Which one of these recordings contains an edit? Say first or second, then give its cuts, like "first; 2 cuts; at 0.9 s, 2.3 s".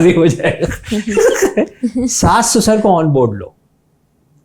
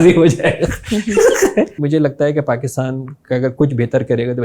second; 1 cut; at 1.8 s